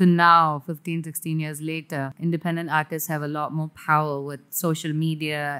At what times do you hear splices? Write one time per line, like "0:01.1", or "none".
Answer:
0:02.1